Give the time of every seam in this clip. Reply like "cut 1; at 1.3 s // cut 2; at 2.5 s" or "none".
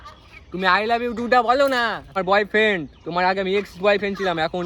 cut 1; at 2.2 s